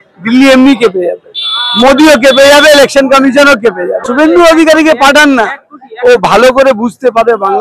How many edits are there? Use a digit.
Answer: 1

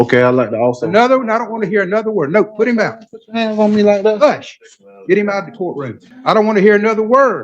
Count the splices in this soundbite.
1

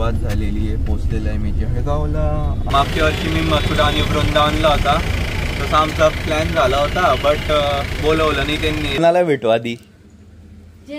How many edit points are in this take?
2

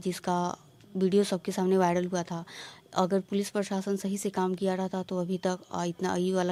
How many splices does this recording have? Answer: 0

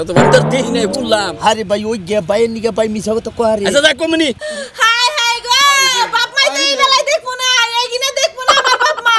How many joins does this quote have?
1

